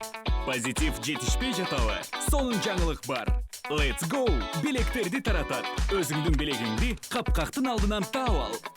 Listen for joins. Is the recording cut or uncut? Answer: uncut